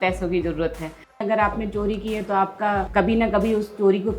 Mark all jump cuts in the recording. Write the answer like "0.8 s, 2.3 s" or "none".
1.2 s, 2.9 s